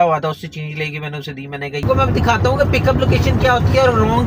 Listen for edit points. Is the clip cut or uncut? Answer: cut